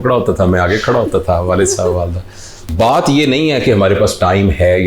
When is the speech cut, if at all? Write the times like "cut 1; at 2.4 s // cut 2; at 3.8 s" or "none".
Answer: cut 1; at 2.6 s